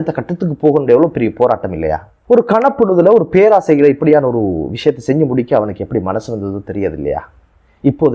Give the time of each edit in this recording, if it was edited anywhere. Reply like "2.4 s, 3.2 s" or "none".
none